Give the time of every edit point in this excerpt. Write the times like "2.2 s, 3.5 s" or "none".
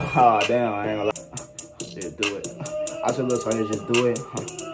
1.1 s